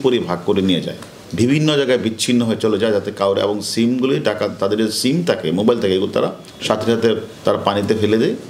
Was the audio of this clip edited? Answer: no; 0 cuts

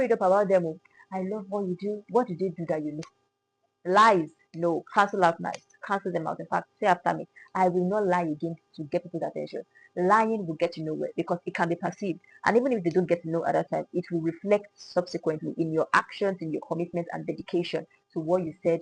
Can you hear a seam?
no; 0 cuts

